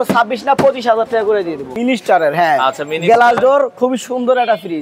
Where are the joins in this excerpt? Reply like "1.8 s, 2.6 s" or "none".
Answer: 1.7 s